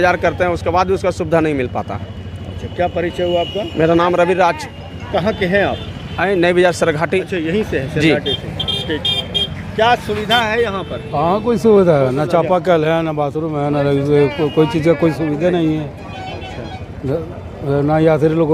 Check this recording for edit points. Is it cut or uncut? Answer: uncut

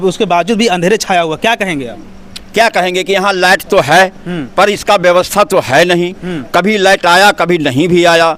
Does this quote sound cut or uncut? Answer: uncut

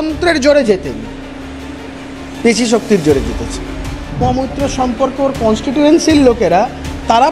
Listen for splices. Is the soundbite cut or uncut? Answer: cut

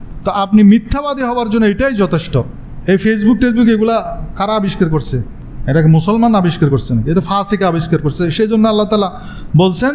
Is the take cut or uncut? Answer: uncut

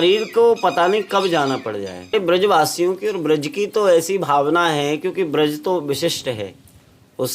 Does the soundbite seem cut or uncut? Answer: cut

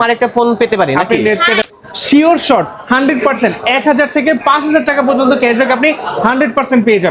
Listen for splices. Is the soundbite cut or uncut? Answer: cut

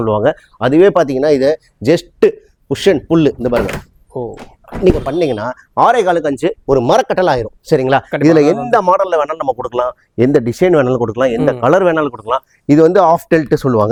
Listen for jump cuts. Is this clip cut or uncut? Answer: uncut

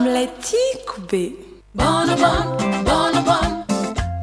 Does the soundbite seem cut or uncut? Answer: cut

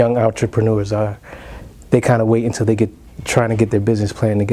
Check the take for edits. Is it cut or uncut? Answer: uncut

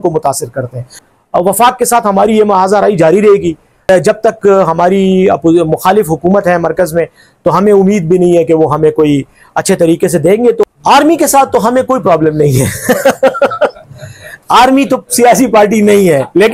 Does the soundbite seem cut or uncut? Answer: cut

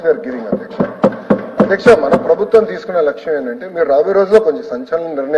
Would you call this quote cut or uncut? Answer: uncut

